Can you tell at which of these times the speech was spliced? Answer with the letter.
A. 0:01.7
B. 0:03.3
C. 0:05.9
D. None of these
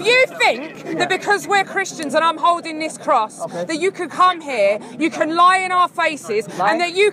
D